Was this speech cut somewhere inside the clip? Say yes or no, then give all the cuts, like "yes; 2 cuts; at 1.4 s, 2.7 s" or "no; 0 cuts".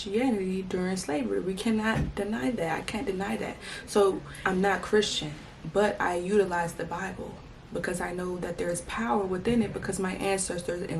yes; 1 cut; at 4.3 s